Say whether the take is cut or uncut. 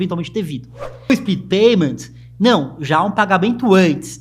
cut